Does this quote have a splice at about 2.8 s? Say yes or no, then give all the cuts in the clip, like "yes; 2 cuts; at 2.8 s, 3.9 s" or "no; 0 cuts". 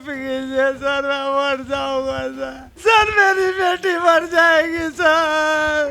yes; 1 cut; at 2.8 s